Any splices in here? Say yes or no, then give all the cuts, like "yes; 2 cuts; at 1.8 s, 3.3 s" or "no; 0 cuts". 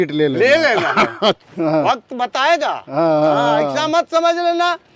yes; 1 cut; at 1.5 s